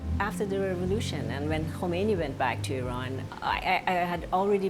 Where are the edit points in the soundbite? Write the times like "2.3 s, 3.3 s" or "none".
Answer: none